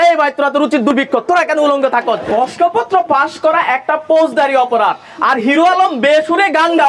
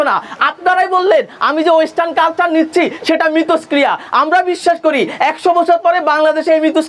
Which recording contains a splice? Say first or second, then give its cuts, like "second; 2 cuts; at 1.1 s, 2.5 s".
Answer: first; 2 cuts; at 0.9 s, 2.2 s